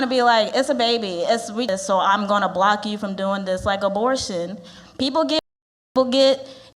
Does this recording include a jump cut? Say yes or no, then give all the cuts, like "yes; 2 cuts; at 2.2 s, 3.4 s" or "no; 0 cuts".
yes; 1 cut; at 1.7 s